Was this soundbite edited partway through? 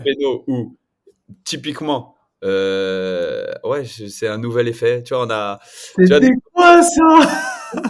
no; 0 cuts

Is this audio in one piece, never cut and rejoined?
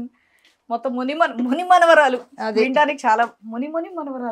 yes; 0 cuts

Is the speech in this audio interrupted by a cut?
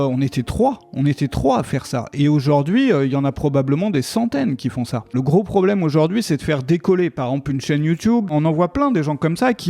yes; 1 cut; at 5.2 s

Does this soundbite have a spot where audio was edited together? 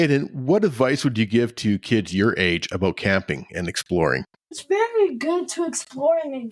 no; 0 cuts

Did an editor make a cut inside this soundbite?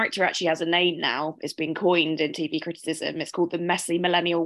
no; 0 cuts

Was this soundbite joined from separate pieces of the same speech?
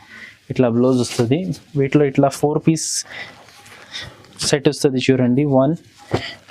no; 0 cuts

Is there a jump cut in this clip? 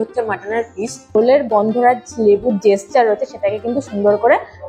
yes; 1 cut; at 1.0 s

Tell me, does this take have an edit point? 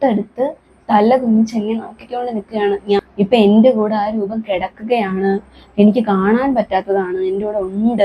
yes; 1 cut; at 3.0 s

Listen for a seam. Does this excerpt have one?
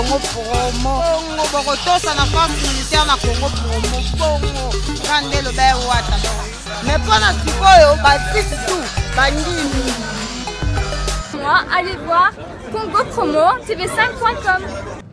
yes; 1 cut; at 11.3 s

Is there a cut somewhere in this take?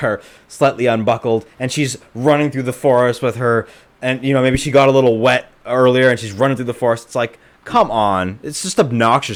no; 0 cuts

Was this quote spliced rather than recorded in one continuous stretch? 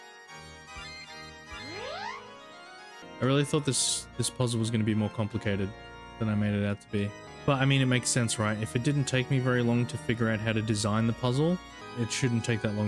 yes; 3 cuts; at 3.0 s, 7.3 s, 11.8 s

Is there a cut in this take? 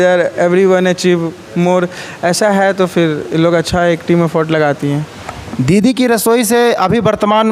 no; 0 cuts

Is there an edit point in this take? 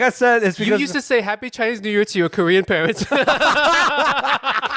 no; 0 cuts

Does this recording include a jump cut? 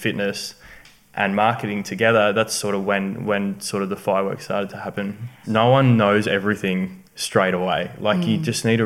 yes; 1 cut; at 5.4 s

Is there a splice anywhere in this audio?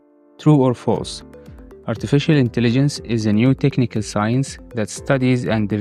no; 0 cuts

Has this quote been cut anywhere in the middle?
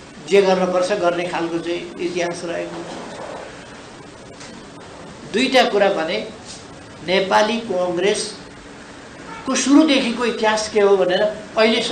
no; 0 cuts

